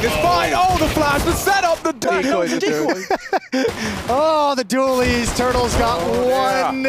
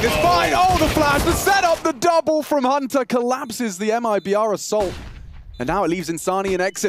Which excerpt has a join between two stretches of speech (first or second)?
first